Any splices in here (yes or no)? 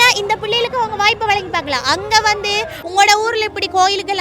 yes